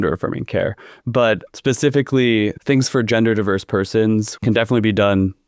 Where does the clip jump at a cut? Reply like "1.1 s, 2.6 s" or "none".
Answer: 2.6 s, 4.3 s